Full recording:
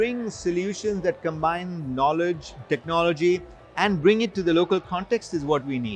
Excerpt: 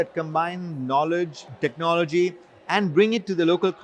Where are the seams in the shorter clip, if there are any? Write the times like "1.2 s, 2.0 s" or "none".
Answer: none